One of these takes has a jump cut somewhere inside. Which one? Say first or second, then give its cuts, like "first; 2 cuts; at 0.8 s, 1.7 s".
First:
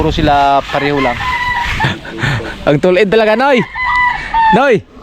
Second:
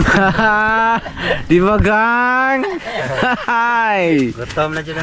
first; 1 cut; at 1.8 s